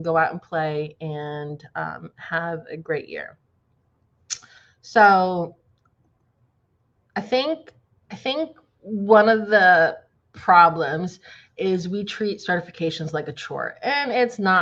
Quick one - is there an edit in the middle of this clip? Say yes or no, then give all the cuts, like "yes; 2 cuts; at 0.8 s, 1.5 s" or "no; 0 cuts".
no; 0 cuts